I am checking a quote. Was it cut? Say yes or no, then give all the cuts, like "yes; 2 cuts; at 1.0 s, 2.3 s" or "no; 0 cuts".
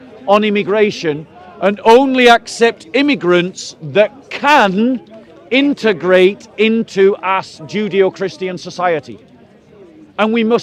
no; 0 cuts